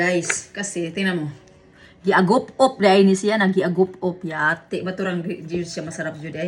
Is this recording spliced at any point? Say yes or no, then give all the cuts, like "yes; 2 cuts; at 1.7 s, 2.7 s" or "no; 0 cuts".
no; 0 cuts